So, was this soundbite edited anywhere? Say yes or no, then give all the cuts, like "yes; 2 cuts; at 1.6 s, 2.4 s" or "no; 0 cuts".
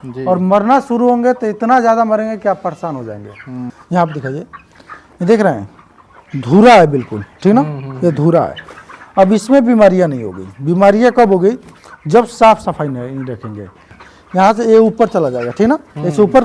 yes; 2 cuts; at 3.6 s, 14.0 s